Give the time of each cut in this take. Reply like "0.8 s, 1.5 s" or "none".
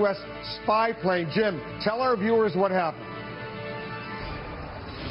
3.0 s